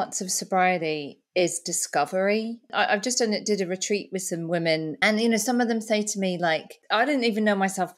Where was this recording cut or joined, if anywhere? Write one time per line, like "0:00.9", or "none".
0:02.7
0:04.9
0:06.7